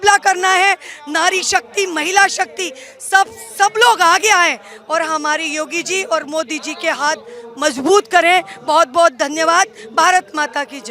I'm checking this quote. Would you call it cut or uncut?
uncut